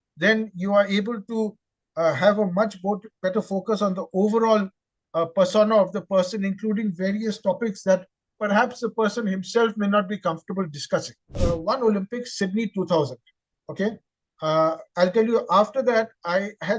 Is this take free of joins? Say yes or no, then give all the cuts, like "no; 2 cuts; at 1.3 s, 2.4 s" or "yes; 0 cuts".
no; 1 cut; at 11.4 s